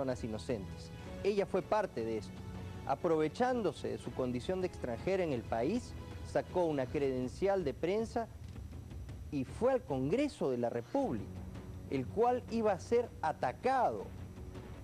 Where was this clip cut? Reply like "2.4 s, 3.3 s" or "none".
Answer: 5.0 s